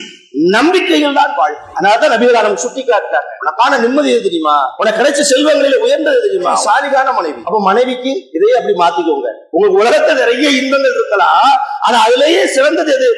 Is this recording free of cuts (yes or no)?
no